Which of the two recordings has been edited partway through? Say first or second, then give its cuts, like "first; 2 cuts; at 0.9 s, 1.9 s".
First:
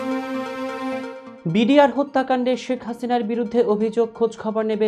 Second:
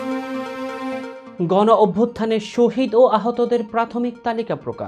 first; 1 cut; at 1.2 s